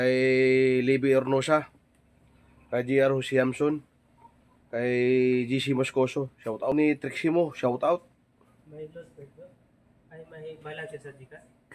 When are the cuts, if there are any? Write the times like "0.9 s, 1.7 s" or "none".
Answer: 6.7 s